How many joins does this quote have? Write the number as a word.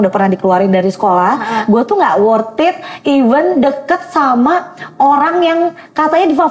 zero